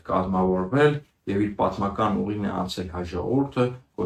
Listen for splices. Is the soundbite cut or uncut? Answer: uncut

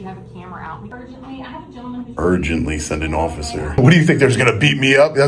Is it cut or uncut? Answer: cut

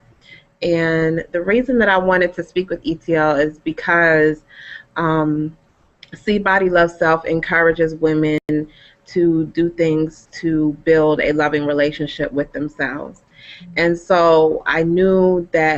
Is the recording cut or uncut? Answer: cut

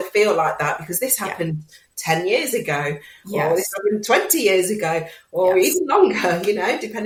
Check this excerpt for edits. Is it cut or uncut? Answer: uncut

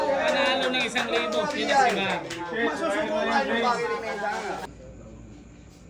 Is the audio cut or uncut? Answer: cut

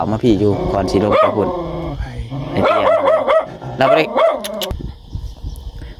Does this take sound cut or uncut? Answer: cut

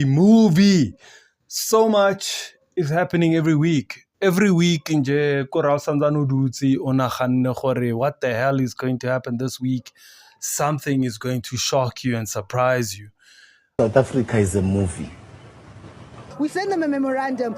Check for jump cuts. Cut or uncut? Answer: cut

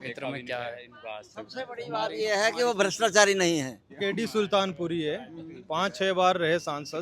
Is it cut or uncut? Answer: cut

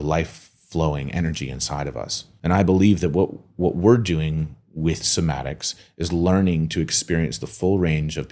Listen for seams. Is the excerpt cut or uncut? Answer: cut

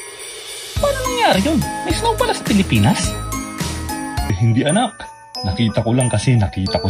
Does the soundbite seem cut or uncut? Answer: cut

